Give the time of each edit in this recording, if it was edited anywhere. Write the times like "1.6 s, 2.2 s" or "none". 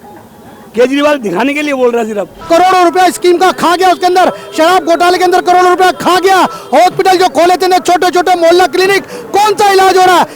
2.4 s